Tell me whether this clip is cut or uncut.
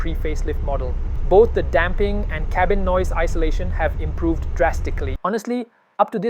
cut